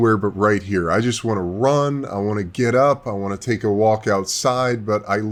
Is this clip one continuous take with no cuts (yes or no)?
yes